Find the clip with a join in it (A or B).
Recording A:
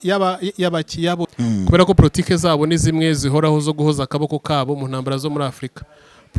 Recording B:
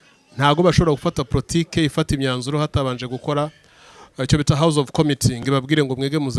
A